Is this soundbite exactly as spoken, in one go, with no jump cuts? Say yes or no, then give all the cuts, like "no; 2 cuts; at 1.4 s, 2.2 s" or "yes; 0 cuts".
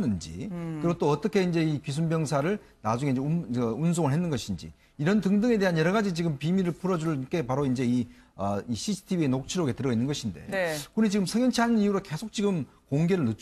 no; 1 cut; at 6.1 s